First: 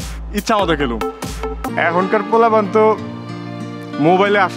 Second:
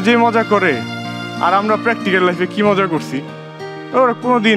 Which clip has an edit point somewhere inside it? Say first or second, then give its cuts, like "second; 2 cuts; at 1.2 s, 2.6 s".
first; 1 cut; at 1.6 s